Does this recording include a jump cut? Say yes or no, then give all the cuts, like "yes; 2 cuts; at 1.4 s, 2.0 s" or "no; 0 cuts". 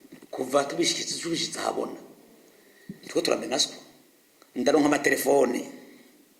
no; 0 cuts